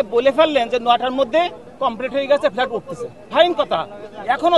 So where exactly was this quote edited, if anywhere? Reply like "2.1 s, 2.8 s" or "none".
1.6 s